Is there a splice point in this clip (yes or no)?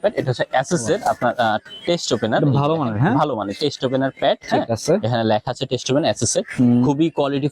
no